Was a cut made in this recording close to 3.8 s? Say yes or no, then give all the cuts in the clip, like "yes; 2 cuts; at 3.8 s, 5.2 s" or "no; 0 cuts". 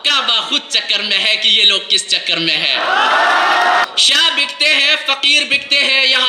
yes; 1 cut; at 3.8 s